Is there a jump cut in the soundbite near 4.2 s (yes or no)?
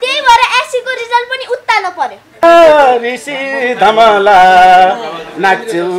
no